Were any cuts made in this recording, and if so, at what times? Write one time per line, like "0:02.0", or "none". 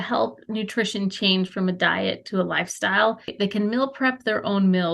0:03.3